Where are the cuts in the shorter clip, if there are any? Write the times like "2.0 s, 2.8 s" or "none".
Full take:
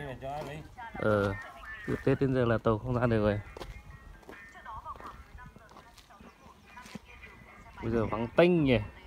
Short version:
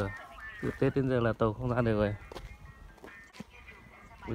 3.3 s